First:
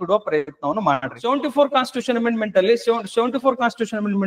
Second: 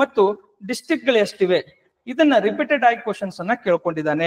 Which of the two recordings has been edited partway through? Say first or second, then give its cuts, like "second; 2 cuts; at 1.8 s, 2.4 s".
first; 1 cut; at 1.1 s